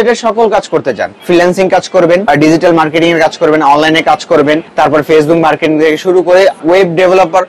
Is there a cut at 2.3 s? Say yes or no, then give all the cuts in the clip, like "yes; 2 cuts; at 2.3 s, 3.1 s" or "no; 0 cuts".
yes; 4 cuts; at 1.1 s, 2.3 s, 4.7 s, 6.6 s